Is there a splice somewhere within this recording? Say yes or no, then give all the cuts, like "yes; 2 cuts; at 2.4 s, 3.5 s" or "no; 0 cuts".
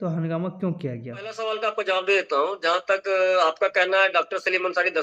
yes; 1 cut; at 1.4 s